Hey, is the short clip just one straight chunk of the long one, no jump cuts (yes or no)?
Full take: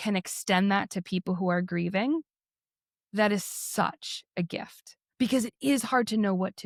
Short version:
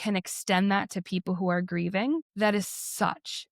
no